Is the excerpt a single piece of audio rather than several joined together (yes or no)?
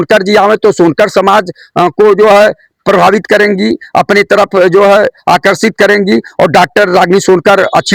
yes